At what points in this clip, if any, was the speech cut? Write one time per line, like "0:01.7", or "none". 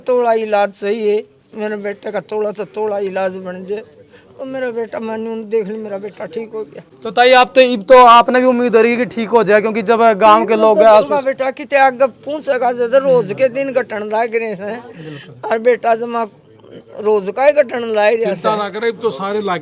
none